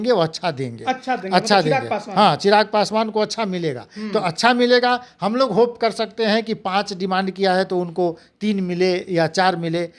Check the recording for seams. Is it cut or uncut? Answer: uncut